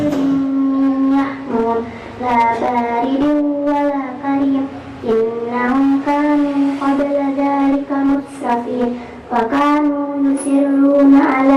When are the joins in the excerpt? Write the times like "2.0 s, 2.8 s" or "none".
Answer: none